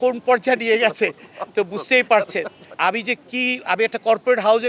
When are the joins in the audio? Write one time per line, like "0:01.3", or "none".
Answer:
0:02.7